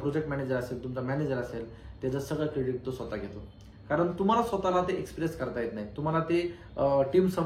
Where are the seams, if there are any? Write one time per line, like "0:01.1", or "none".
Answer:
none